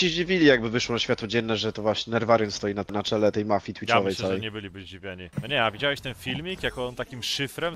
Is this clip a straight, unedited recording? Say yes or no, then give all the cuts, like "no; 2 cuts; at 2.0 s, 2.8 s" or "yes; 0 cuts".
no; 2 cuts; at 2.9 s, 5.3 s